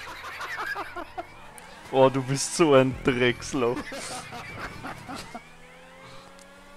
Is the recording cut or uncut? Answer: uncut